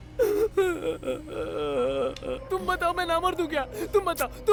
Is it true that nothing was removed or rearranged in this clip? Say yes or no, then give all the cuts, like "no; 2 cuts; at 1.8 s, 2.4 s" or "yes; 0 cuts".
yes; 0 cuts